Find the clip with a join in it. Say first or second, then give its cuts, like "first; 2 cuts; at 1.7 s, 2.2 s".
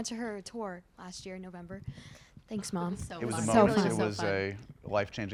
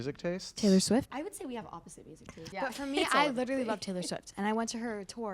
second; 2 cuts; at 1.1 s, 2.4 s